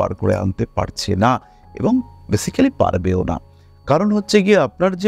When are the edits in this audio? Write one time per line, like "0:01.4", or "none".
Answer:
none